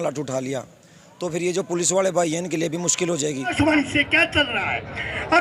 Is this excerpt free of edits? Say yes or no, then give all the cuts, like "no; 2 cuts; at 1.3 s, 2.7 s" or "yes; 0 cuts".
no; 1 cut; at 3.5 s